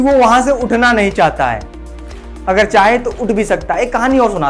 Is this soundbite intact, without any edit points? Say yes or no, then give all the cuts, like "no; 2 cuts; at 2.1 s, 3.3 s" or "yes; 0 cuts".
yes; 0 cuts